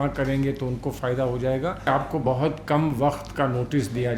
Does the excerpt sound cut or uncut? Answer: cut